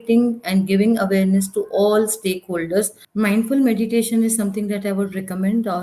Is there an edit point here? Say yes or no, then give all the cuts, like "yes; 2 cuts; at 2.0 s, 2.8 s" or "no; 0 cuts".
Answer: yes; 1 cut; at 3.0 s